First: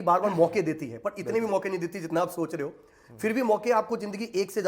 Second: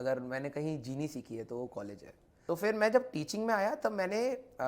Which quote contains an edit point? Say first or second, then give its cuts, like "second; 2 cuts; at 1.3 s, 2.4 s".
second; 1 cut; at 2.4 s